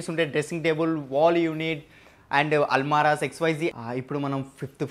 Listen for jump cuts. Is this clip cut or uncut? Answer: cut